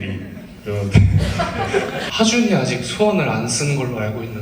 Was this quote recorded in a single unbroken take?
no; 1 cut; at 2.1 s

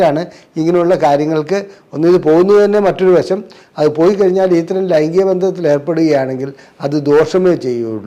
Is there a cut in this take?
no; 0 cuts

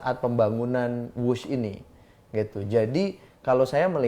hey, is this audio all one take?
yes; 0 cuts

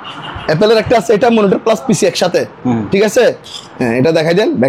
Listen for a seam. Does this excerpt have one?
no; 0 cuts

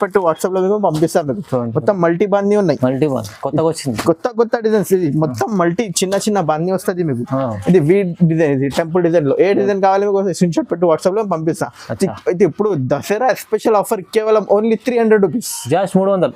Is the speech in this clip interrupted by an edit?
no; 0 cuts

